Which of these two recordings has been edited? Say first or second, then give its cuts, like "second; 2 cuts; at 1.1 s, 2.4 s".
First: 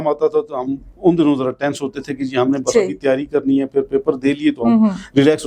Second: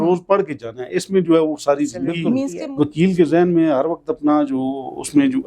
second; 1 cut; at 2.5 s